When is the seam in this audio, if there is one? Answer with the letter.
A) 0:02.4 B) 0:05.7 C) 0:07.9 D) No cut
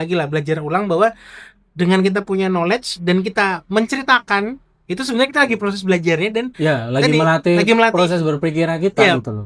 D